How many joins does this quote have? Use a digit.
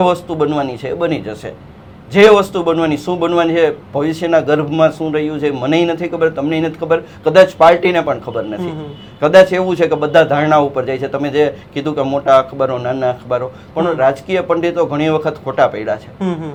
0